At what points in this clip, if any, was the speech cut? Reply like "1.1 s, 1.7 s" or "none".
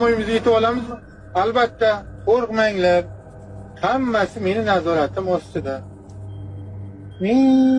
none